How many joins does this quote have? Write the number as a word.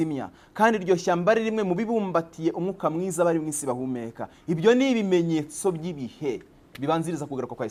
zero